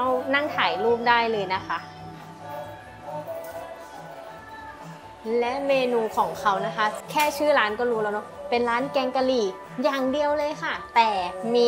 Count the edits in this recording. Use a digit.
0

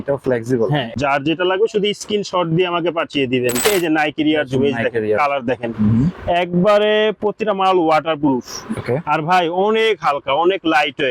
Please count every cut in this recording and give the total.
2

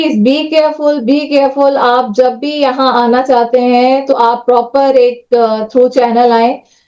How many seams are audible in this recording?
0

